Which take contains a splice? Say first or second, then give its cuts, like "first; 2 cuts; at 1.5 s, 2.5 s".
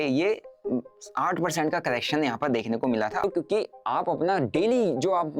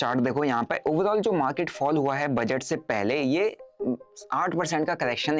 first; 1 cut; at 3.2 s